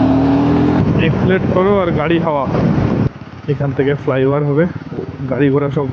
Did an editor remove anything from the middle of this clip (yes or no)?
yes